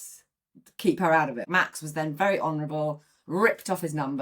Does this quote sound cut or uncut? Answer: cut